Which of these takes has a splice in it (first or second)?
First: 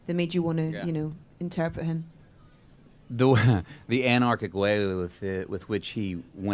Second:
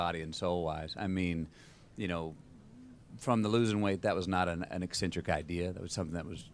first